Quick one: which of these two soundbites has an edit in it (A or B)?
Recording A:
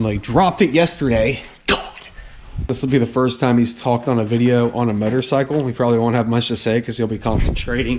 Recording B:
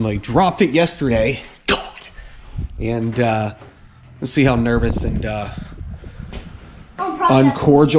A